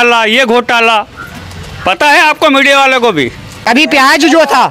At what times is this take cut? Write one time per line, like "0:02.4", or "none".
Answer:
0:03.7